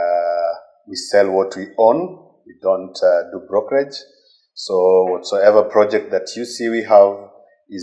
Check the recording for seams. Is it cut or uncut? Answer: uncut